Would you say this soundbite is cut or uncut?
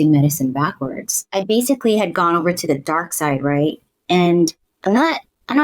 cut